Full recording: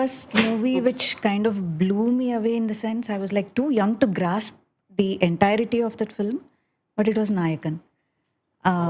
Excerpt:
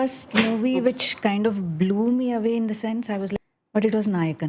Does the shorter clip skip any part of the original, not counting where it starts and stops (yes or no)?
yes